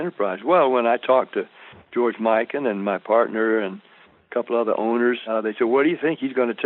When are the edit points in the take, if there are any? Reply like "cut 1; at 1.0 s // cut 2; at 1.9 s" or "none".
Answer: cut 1; at 5.2 s